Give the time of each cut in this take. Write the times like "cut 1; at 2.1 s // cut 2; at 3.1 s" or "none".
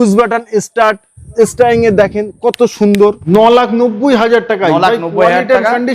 cut 1; at 3.2 s